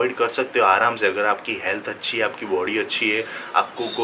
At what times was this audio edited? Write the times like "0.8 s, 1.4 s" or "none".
none